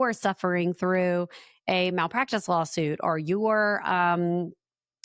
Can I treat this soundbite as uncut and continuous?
yes; 0 cuts

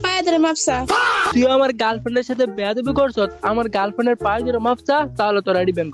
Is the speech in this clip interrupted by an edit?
yes; 1 cut; at 0.9 s

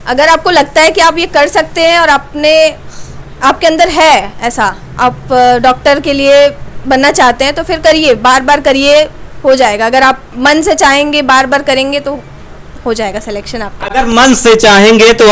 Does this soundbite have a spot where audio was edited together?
no; 0 cuts

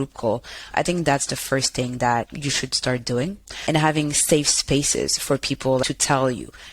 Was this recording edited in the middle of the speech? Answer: yes; 2 cuts; at 2.3 s, 5.8 s

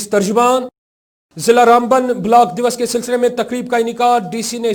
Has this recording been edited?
no; 0 cuts

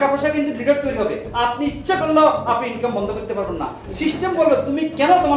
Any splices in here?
no; 0 cuts

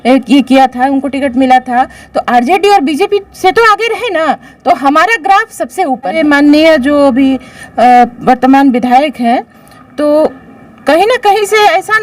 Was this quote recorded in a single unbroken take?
no; 1 cut; at 6.2 s

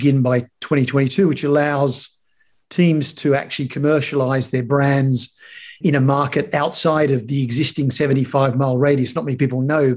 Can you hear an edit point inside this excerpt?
yes; 1 cut; at 5.8 s

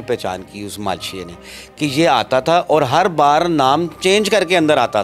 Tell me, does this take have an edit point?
no; 0 cuts

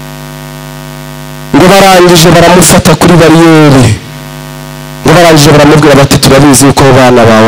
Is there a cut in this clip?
no; 0 cuts

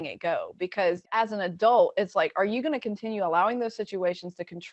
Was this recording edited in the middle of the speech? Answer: yes; 1 cut; at 1.2 s

